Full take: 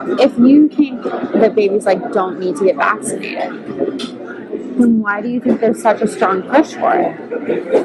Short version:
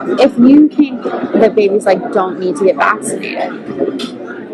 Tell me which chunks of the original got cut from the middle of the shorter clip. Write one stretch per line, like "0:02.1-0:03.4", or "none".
none